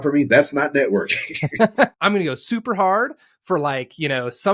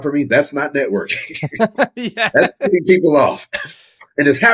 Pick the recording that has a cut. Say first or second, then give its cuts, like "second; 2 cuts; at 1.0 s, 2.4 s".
first; 1 cut; at 1.9 s